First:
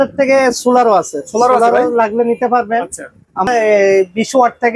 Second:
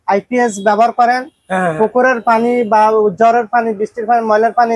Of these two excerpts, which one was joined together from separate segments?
first; 1 cut; at 3.5 s

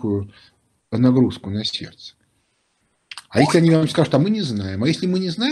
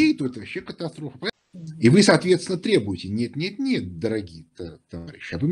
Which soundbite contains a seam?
second; 1 cut; at 1.3 s

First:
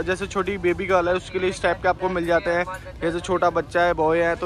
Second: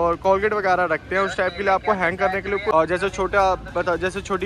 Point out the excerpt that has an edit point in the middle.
second; 1 cut; at 2.7 s

